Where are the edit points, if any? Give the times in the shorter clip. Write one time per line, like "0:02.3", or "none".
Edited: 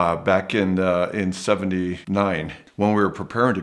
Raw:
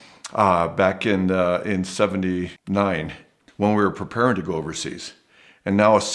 0:02.1